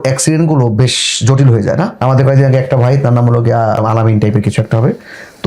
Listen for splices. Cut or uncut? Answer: cut